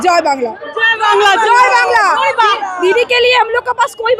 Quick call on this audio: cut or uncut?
uncut